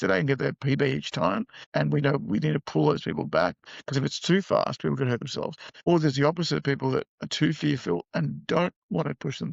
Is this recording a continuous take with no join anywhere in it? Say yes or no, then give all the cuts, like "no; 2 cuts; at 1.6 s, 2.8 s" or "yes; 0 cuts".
no; 2 cuts; at 3.7 s, 5.6 s